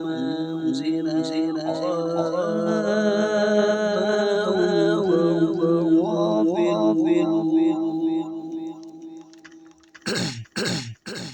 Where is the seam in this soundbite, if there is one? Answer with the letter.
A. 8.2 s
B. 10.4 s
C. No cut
B